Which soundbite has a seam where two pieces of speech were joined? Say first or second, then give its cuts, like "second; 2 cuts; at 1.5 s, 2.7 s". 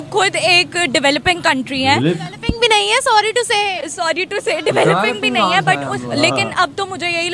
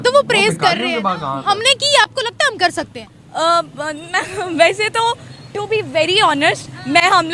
first; 1 cut; at 6.0 s